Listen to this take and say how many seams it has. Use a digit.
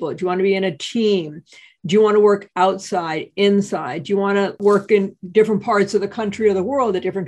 1